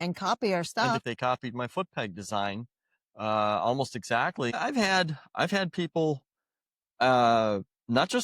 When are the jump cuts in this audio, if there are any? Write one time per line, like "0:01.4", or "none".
0:01.0
0:04.6